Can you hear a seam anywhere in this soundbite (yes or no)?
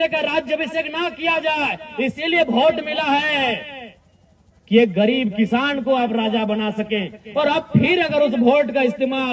no